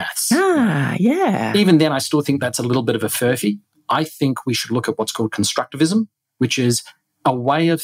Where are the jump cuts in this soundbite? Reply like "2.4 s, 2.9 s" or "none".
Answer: 1.5 s